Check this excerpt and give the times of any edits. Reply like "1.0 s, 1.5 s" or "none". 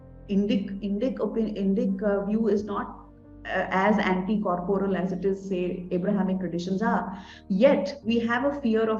none